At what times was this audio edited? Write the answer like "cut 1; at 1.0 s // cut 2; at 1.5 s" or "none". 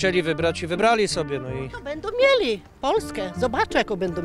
none